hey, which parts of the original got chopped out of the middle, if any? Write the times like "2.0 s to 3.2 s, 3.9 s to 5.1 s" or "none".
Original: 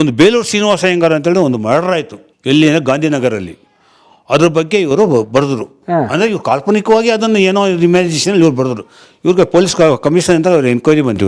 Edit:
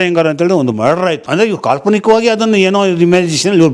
2.1 s to 6.1 s

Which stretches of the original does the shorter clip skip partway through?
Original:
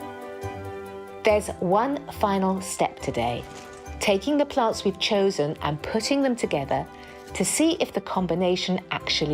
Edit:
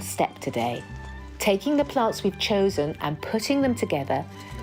none

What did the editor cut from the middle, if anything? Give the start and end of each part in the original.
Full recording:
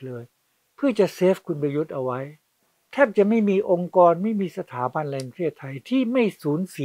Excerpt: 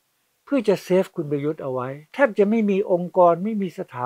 2.3 s to 2.8 s

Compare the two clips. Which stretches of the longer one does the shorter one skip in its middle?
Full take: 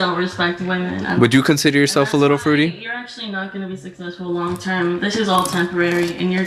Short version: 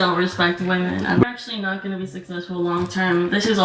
1.2 s to 2.9 s

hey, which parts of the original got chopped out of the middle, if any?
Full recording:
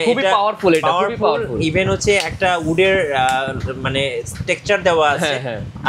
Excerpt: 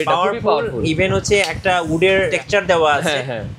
3.1 s to 4.5 s

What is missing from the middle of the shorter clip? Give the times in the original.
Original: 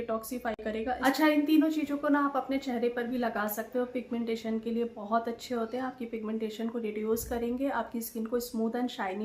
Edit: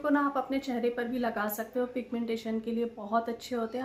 none

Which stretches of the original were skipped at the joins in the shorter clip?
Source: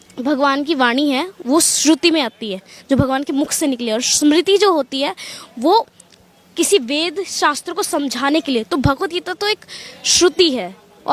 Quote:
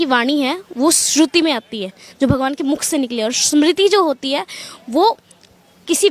none

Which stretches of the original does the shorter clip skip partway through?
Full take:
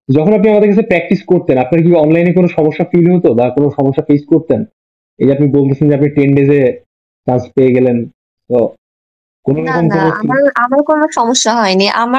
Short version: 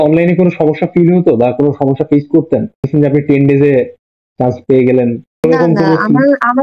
4.8 s to 5.7 s, 8.3 s to 9.6 s

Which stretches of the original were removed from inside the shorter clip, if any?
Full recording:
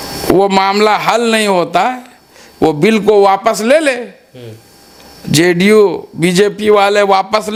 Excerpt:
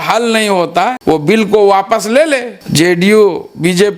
2.0 s to 2.5 s, 4.1 s to 5.2 s

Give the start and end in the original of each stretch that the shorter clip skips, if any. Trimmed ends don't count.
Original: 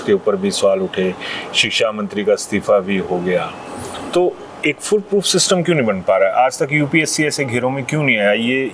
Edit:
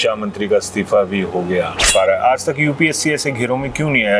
3.6 s to 6.0 s

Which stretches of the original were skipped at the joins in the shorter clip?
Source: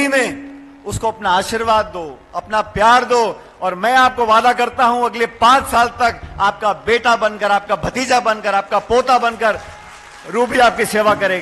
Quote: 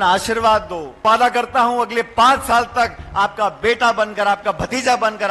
2.3 s to 4.3 s

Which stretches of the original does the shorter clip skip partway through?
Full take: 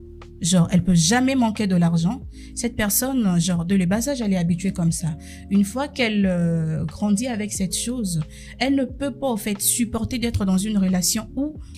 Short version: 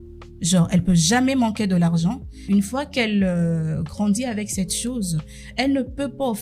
2.3 s to 5.3 s

